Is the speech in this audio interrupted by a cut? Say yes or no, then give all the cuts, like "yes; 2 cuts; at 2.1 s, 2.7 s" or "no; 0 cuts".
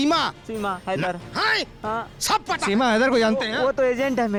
no; 0 cuts